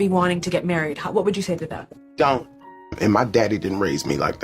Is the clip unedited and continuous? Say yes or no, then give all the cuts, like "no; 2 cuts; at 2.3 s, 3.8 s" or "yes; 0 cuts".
no; 1 cut; at 2.8 s